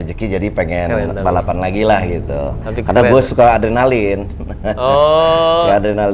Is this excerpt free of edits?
yes; 0 cuts

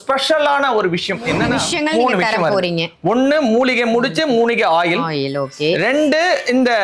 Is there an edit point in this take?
yes; 1 cut; at 1.6 s

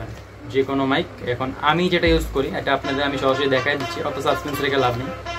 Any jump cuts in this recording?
no; 0 cuts

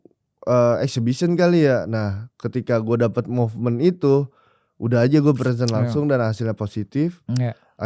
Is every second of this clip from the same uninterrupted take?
yes; 0 cuts

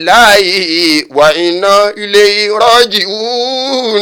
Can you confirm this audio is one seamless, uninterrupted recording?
yes; 0 cuts

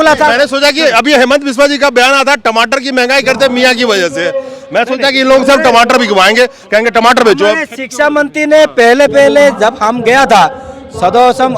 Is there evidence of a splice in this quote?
no; 0 cuts

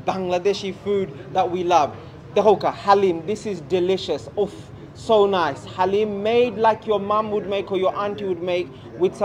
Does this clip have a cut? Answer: no; 0 cuts

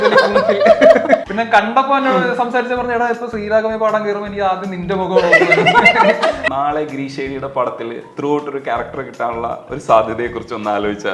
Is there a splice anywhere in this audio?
yes; 2 cuts; at 1.2 s, 6.4 s

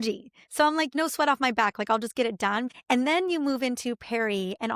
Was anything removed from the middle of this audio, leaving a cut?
yes; 2 cuts; at 0.9 s, 2.7 s

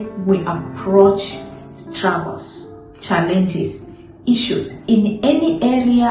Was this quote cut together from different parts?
no; 0 cuts

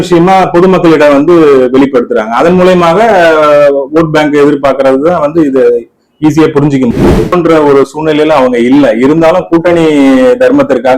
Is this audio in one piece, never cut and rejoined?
no; 1 cut; at 7.2 s

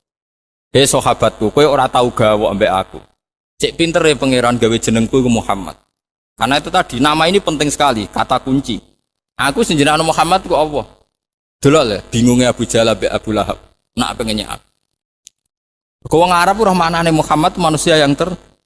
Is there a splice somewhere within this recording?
yes; 1 cut; at 9.0 s

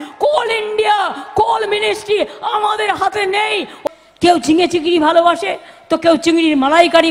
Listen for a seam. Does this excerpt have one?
yes; 1 cut; at 3.8 s

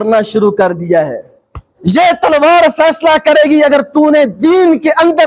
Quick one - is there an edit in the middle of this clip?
yes; 1 cut; at 1.7 s

